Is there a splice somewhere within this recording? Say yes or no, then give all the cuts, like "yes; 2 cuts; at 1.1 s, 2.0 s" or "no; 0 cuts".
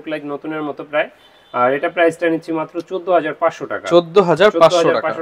no; 0 cuts